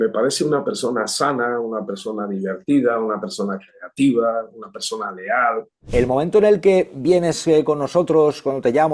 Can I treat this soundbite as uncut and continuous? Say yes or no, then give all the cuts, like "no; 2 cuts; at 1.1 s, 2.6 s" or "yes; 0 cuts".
no; 1 cut; at 5.9 s